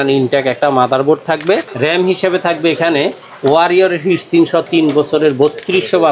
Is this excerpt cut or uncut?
cut